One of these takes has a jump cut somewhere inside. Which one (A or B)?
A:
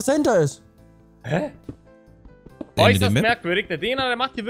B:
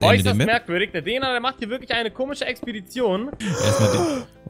B